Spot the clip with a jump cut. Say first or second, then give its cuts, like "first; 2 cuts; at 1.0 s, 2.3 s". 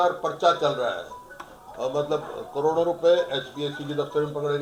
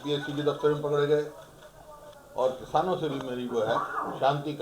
second; 1 cut; at 2.1 s